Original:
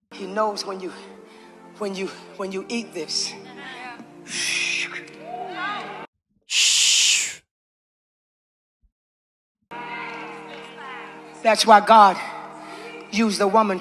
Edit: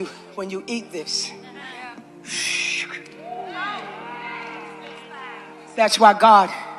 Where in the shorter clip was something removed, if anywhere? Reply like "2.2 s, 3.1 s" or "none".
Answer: 4.0 s